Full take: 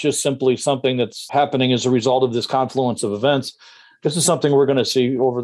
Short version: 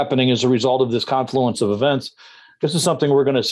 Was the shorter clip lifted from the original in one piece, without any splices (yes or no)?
yes